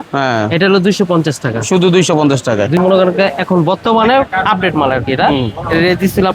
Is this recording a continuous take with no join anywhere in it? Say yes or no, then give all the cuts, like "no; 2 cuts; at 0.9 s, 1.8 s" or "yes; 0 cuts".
no; 1 cut; at 2.8 s